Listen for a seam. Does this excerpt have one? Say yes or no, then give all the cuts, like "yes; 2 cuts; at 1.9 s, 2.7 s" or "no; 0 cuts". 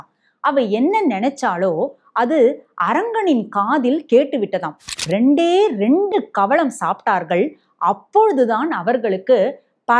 yes; 1 cut; at 4.9 s